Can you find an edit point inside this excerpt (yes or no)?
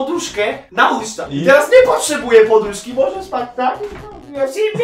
no